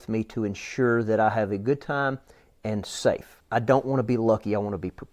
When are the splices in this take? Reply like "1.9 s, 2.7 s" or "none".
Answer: 3.3 s